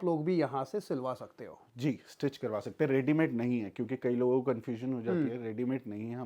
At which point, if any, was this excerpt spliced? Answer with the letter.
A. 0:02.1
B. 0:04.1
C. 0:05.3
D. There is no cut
D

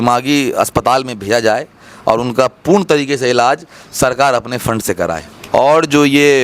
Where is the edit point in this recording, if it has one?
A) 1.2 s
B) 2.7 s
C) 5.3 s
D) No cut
C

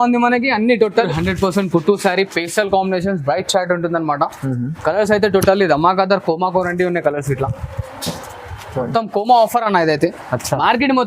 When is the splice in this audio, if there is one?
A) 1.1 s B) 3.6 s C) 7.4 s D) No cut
A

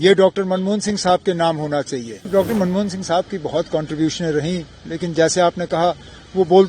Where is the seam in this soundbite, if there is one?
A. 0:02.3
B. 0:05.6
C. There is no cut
A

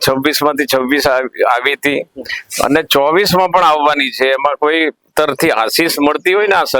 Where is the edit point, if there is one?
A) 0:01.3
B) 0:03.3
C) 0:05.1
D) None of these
C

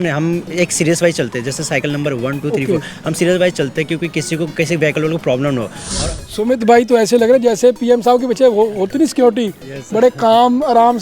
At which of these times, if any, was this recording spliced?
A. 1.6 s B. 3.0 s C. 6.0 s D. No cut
C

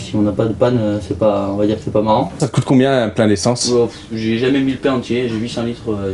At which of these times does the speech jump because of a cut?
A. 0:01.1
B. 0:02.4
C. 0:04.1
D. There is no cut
B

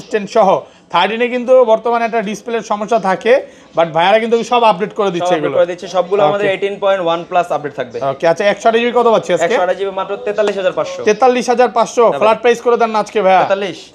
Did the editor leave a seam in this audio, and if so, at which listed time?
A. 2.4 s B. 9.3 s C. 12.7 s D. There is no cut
D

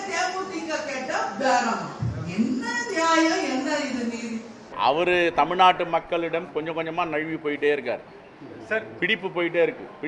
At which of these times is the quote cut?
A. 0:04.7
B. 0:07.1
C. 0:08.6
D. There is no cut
A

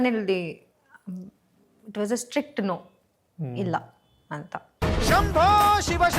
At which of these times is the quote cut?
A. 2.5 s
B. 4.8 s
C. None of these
B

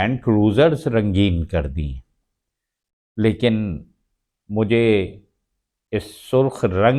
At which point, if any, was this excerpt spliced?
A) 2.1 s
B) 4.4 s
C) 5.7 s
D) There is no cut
D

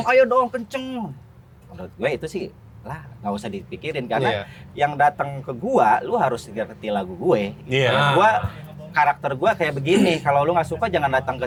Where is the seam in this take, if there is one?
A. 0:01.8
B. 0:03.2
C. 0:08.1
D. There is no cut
D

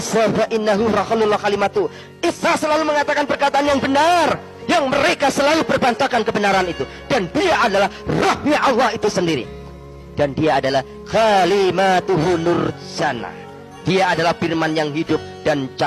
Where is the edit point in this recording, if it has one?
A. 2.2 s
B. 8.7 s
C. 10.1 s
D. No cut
D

